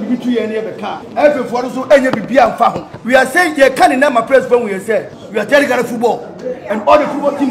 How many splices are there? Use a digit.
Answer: 3